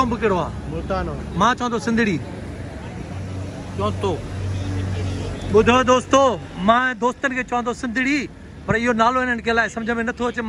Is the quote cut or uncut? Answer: uncut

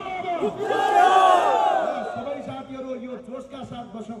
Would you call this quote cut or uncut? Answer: uncut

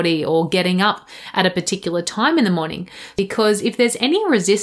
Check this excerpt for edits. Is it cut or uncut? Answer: cut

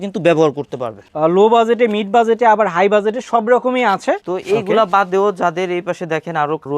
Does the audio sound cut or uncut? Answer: cut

